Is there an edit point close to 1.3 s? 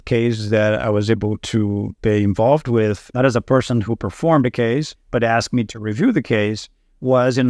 no; 2 cuts; at 3.0 s, 5.0 s

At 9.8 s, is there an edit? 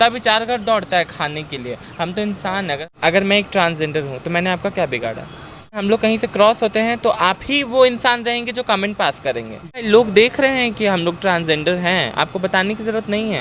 yes; 3 cuts; at 2.8 s, 5.8 s, 9.8 s

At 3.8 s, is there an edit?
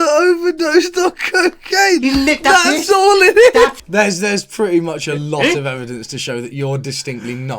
yes; 1 cut; at 3.8 s

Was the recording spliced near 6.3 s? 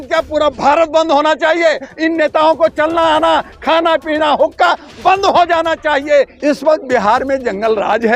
yes; 1 cut; at 6.3 s

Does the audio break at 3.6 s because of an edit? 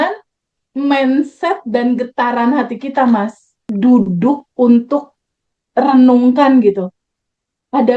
yes; 1 cut; at 3.6 s

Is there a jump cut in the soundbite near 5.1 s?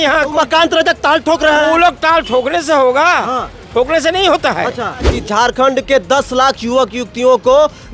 yes; 1 cut; at 5.1 s

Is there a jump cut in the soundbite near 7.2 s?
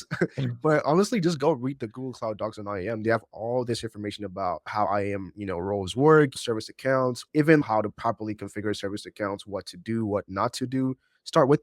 yes; 1 cut; at 7.2 s

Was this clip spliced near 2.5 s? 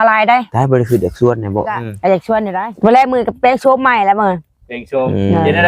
yes; 1 cut; at 2.5 s

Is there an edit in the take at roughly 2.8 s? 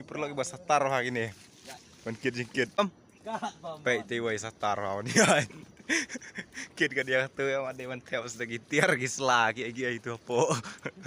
yes; 1 cut; at 2.8 s

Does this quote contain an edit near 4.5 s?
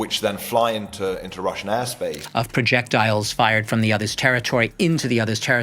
no; 1 cut; at 2.2 s

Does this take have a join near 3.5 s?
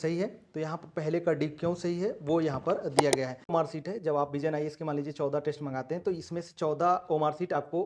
yes; 1 cut; at 3.5 s

